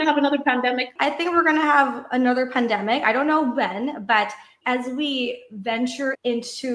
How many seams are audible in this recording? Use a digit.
1